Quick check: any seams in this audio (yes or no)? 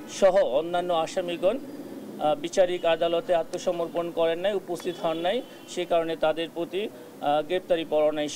no